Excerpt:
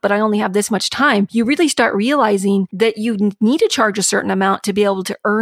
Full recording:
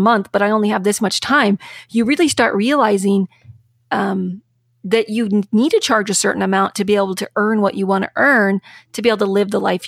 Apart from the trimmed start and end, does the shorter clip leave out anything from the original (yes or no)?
yes